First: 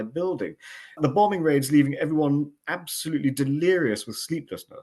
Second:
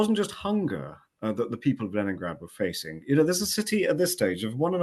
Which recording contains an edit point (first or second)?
first